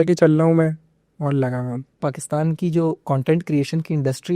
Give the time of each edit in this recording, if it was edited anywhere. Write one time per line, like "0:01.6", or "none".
0:02.1